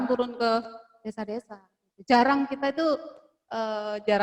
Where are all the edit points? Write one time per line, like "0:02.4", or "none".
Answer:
none